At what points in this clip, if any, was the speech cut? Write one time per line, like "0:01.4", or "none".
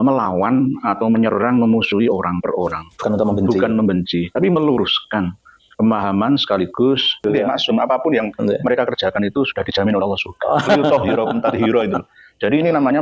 0:07.2

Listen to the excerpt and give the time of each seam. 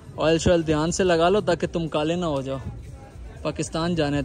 none

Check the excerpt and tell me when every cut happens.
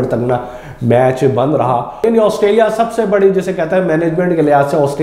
0:02.0

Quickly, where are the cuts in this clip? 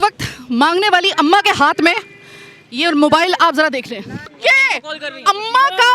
0:04.3

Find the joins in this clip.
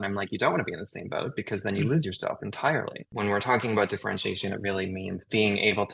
0:03.0

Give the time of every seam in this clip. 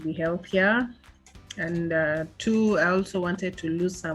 none

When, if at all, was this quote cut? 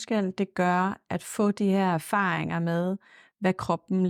none

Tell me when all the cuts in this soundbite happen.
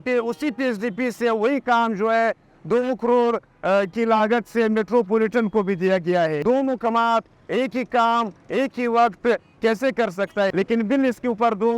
0:06.4
0:10.5

